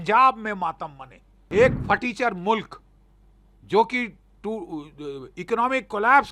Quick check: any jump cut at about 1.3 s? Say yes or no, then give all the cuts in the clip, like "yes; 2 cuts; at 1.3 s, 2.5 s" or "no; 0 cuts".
yes; 1 cut; at 1.3 s